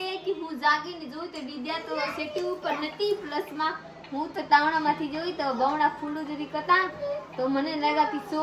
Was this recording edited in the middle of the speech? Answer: no; 0 cuts

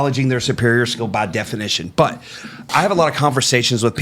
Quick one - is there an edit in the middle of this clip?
yes; 1 cut; at 2.7 s

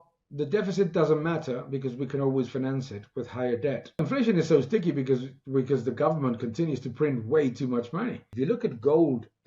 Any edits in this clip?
yes; 2 cuts; at 4.0 s, 8.3 s

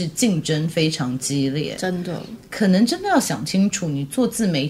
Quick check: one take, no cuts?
yes; 0 cuts

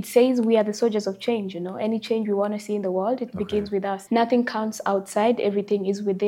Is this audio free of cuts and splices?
no; 1 cut; at 4.0 s

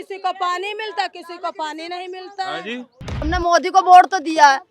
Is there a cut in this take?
yes; 1 cut; at 3.1 s

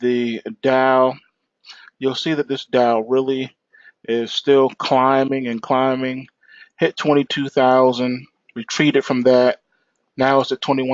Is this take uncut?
no; 1 cut; at 1.0 s

